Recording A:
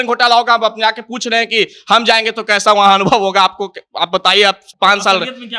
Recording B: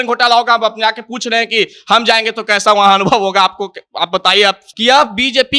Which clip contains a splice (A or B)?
B